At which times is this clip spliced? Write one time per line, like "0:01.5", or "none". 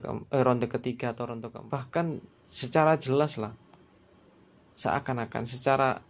0:01.4